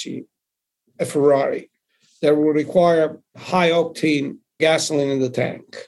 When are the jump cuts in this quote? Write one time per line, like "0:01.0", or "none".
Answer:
0:03.3
0:04.6